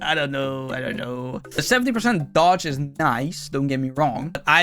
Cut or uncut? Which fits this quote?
cut